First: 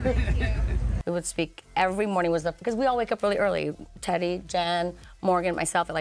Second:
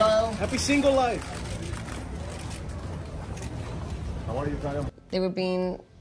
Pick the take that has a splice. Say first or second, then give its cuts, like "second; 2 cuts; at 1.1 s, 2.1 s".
second; 1 cut; at 5.0 s